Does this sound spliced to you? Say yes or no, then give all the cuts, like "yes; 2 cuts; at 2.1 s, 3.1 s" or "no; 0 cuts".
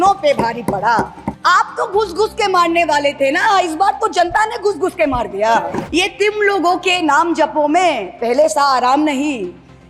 yes; 2 cuts; at 1.2 s, 5.9 s